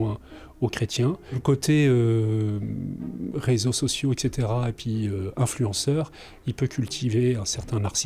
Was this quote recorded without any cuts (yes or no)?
no